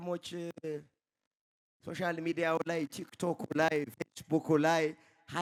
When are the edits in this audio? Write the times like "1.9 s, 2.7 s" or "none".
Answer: none

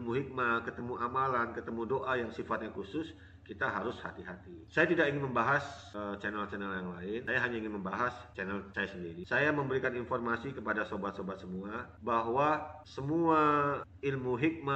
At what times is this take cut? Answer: none

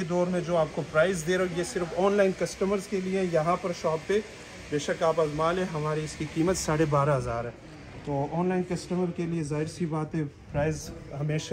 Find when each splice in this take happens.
none

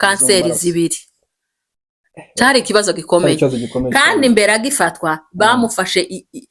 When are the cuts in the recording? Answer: none

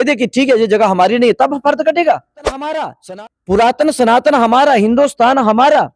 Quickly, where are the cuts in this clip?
2.9 s

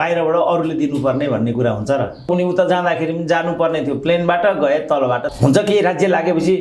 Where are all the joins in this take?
2.3 s, 5.3 s

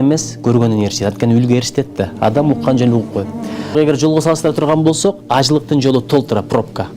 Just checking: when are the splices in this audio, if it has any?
3.7 s

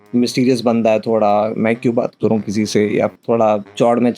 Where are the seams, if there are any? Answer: 3.1 s

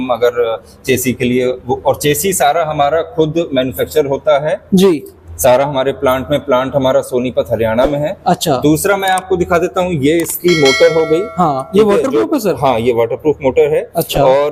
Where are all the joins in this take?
none

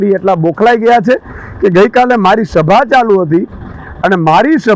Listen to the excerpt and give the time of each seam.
none

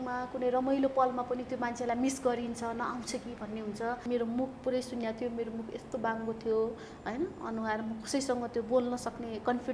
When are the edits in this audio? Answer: 4.0 s

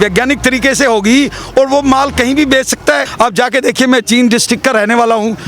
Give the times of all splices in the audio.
3.1 s

